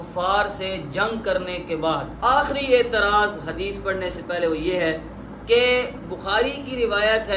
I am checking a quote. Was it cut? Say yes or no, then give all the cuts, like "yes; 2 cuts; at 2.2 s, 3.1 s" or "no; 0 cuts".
yes; 1 cut; at 2.1 s